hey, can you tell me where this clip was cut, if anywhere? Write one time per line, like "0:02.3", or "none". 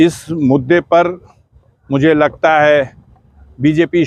none